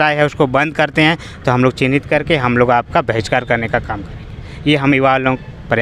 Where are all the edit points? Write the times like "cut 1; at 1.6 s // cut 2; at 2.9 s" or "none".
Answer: none